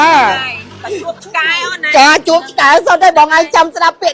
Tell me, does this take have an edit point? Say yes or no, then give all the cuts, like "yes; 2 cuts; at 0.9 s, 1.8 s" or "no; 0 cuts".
no; 0 cuts